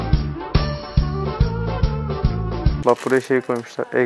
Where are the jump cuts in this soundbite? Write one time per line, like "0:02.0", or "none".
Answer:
0:02.8